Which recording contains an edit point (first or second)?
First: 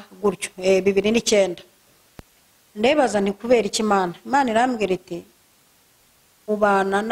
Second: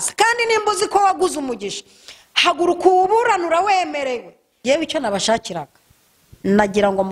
second